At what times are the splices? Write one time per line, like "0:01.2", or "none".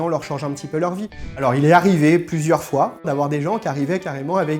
0:01.2
0:03.1